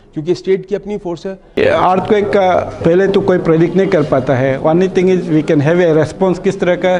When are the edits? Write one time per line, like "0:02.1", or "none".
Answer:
0:01.6
0:02.7